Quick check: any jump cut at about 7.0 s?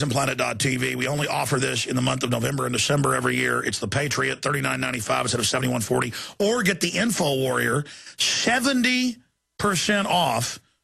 no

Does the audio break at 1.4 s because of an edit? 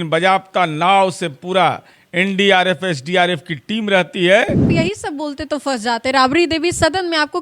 no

